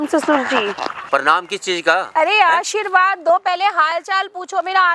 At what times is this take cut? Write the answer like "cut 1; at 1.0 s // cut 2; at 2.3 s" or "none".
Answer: cut 1; at 0.9 s